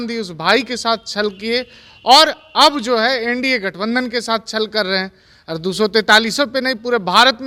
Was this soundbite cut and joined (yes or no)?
no